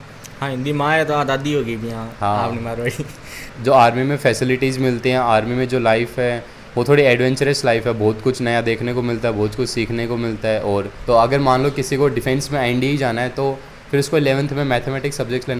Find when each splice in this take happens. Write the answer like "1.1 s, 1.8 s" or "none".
3.5 s, 10.9 s